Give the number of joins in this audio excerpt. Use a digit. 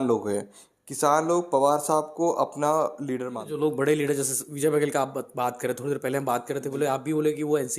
1